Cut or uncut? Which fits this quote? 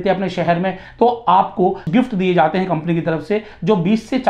cut